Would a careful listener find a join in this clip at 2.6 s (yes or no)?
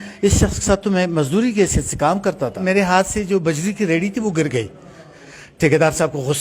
yes